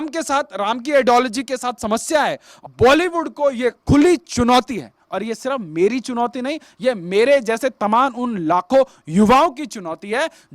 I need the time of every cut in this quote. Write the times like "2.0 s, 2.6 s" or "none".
2.6 s